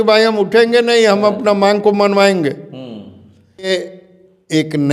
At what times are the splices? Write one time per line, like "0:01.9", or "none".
0:03.7